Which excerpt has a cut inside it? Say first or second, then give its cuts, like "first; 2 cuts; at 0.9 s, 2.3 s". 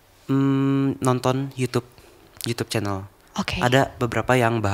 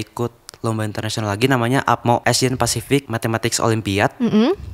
second; 2 cuts; at 2.2 s, 3.1 s